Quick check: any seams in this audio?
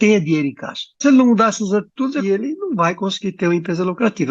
yes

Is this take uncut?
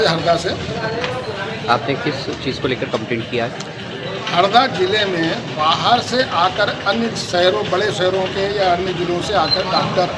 yes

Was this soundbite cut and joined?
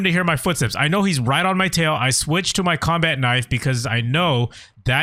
no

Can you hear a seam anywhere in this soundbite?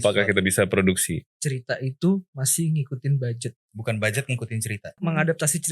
yes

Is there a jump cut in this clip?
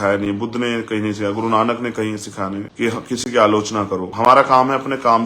yes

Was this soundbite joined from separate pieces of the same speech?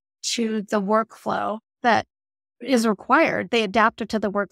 no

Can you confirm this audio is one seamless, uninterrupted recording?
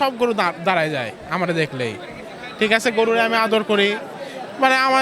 yes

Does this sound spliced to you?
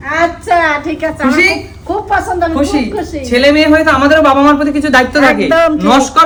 no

